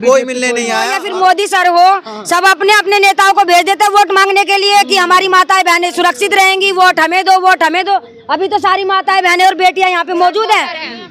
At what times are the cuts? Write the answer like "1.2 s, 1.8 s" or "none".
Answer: 1.0 s